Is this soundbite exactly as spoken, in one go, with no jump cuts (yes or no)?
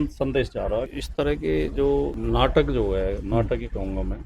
no